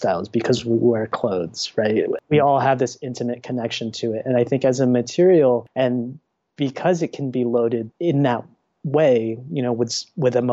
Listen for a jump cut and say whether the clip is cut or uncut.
cut